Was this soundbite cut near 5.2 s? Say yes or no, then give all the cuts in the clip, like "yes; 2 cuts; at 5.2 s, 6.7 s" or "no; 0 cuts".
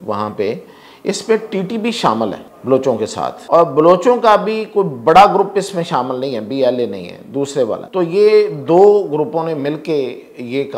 no; 3 cuts; at 2.5 s, 3.4 s, 7.8 s